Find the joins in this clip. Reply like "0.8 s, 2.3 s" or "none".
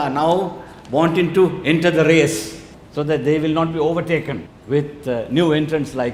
none